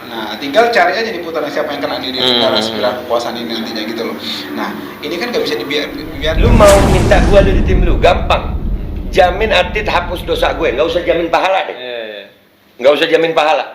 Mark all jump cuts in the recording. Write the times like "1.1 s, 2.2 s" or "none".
6.3 s